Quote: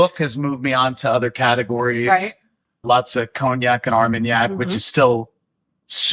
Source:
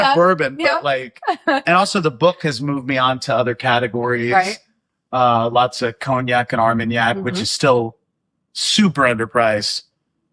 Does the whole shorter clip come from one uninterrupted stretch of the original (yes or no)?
no